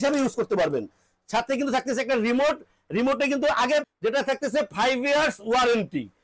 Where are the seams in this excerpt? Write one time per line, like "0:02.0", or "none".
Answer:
0:03.8